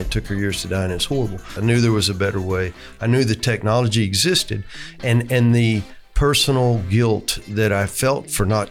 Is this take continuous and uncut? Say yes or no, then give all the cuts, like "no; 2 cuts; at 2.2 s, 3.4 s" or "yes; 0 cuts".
no; 1 cut; at 1.5 s